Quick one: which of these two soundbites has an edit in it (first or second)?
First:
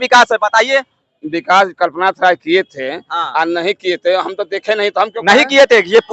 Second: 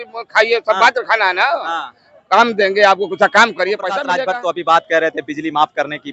second